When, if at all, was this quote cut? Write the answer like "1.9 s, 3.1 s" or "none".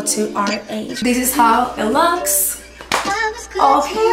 0.9 s